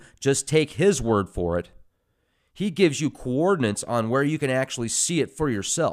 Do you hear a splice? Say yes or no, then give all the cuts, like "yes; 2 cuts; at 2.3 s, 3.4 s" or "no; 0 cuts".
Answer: no; 0 cuts